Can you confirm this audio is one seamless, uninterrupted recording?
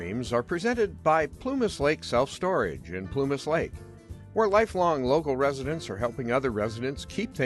no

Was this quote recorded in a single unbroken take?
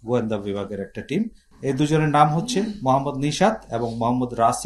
yes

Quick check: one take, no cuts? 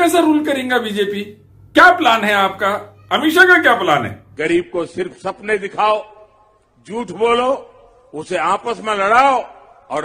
no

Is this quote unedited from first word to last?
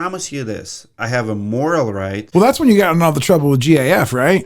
no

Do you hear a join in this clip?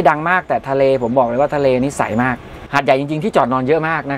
yes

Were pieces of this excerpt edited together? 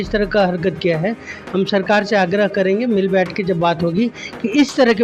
no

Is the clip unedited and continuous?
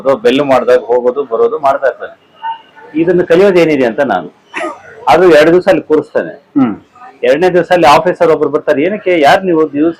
yes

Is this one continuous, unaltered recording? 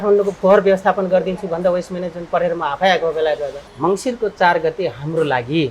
no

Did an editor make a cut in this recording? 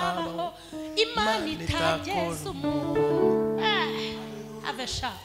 no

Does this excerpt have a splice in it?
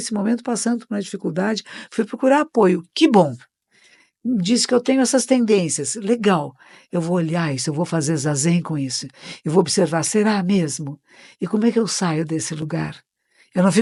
no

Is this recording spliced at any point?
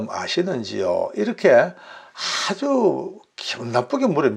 no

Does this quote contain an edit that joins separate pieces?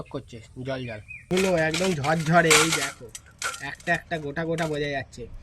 yes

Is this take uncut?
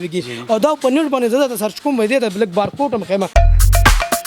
no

